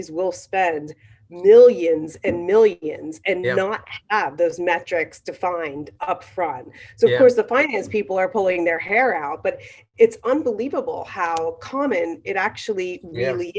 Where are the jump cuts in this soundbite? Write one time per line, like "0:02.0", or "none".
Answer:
none